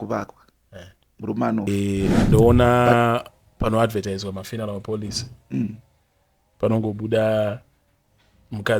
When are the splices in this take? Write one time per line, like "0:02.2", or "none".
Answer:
0:01.7

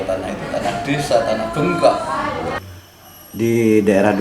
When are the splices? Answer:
0:02.7

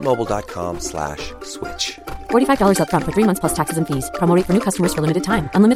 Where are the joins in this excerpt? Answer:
none

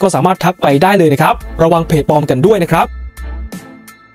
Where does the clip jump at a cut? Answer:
0:03.0

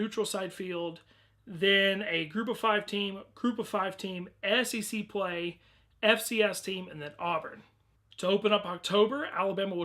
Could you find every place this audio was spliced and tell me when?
0:05.9

